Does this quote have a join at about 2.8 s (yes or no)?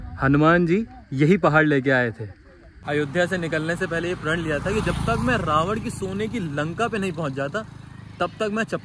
yes